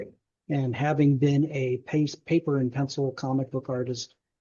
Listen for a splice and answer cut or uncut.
uncut